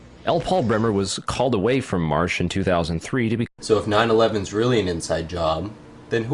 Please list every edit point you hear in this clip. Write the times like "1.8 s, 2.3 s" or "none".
none